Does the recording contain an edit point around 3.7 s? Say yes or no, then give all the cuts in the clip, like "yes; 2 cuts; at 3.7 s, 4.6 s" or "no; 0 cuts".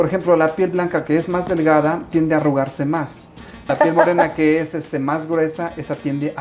yes; 1 cut; at 3.7 s